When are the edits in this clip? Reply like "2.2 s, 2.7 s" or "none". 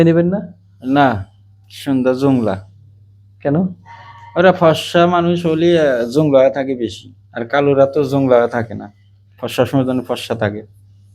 none